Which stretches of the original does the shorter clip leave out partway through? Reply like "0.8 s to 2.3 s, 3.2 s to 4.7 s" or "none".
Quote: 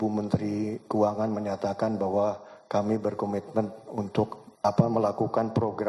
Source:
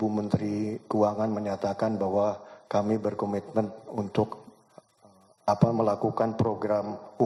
4.4 s to 5.3 s